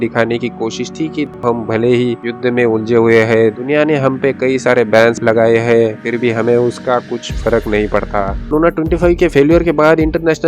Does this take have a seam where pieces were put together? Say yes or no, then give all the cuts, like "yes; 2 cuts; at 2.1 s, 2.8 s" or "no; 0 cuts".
yes; 2 cuts; at 1.3 s, 8.5 s